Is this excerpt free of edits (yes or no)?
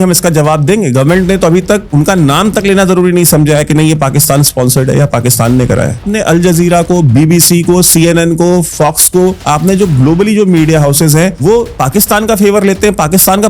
no